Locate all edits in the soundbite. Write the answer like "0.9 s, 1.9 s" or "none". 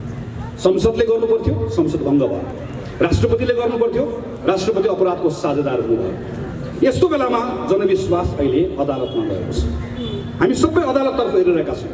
none

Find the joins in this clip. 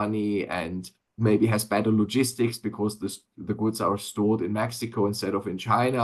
none

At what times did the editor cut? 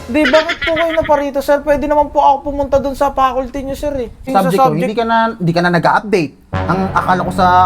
4.3 s

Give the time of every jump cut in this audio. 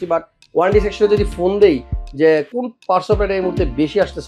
none

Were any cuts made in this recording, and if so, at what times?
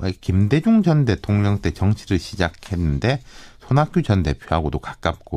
2.2 s

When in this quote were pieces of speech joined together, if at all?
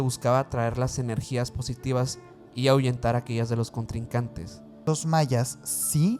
4.8 s

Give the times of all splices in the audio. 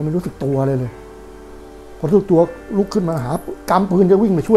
none

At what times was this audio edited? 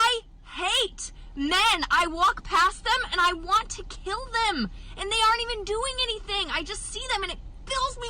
2.1 s, 4.8 s

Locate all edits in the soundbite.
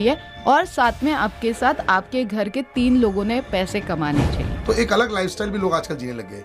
4.4 s

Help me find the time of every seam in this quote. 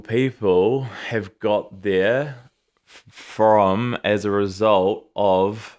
none

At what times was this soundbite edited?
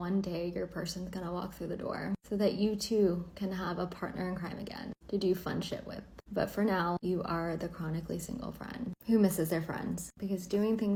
none

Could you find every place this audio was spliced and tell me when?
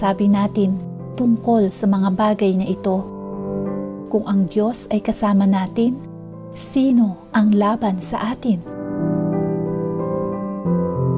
8.7 s, 10.0 s

